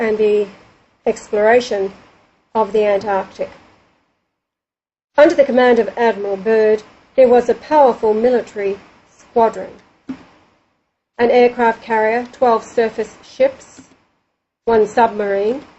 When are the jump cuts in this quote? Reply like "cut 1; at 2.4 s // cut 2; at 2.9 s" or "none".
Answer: cut 1; at 2.9 s